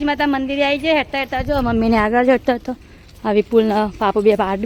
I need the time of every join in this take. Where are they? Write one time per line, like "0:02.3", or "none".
none